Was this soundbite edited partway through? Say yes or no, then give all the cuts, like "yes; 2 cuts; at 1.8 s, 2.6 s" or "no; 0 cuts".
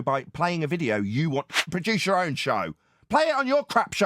yes; 1 cut; at 1.7 s